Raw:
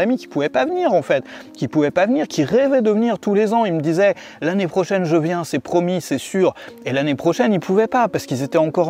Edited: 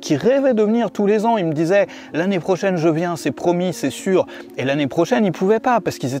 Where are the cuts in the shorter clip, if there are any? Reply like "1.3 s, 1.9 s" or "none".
none